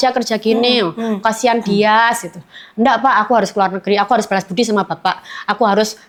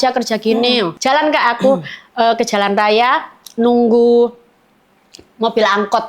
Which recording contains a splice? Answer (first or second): second